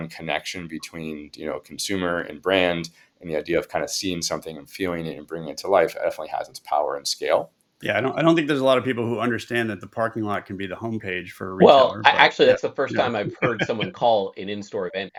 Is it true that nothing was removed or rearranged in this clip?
yes; 0 cuts

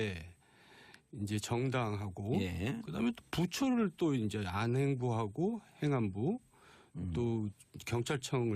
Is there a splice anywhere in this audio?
yes; 1 cut; at 4.1 s

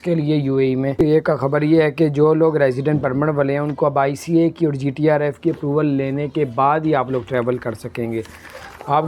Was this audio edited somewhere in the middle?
yes; 1 cut; at 1.0 s

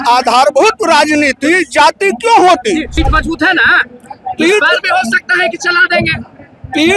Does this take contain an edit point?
yes; 1 cut; at 2.9 s

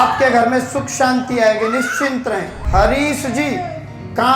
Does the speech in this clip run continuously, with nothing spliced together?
no; 1 cut; at 2.6 s

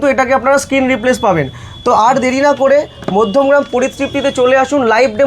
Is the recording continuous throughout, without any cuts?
yes; 0 cuts

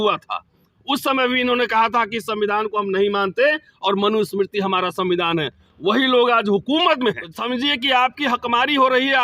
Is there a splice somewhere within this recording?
yes; 1 cut; at 7.3 s

